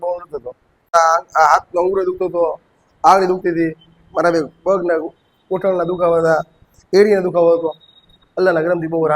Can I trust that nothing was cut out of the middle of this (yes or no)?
no